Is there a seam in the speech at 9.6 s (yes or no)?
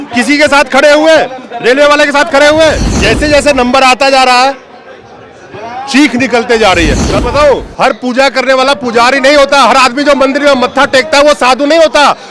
no